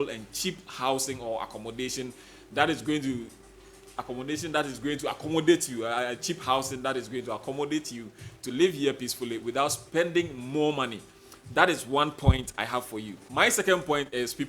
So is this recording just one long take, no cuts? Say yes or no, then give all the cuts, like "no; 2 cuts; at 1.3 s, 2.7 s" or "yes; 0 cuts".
yes; 0 cuts